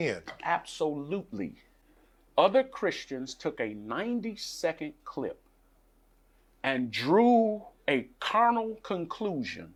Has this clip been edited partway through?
no; 0 cuts

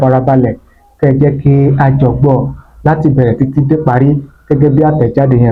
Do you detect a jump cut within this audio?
no; 0 cuts

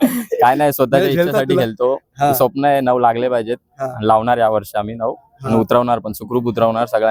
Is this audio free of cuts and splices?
yes; 0 cuts

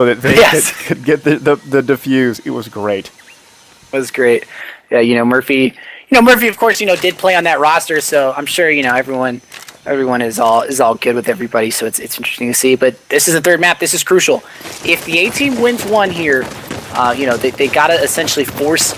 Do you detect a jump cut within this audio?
yes; 1 cut; at 2.0 s

